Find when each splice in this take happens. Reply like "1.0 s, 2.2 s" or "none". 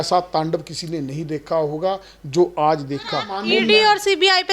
3.3 s